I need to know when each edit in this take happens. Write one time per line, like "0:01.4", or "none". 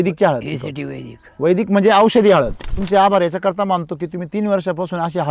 0:02.7